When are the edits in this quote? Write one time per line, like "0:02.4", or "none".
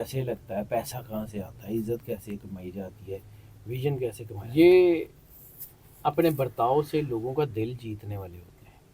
0:04.3